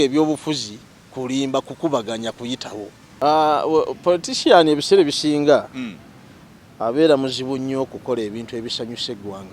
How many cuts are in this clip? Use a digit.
1